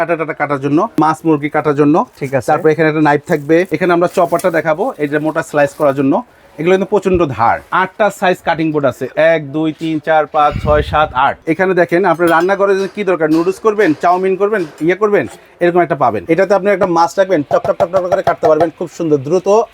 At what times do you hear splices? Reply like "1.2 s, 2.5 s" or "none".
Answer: 1.0 s, 3.7 s, 7.7 s, 11.4 s, 16.2 s